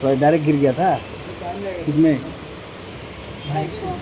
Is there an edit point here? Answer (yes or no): no